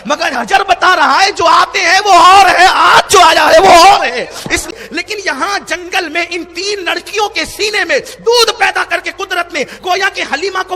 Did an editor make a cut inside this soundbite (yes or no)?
yes